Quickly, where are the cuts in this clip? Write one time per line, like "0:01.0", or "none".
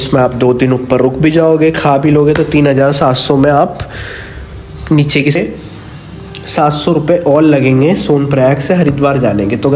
0:05.4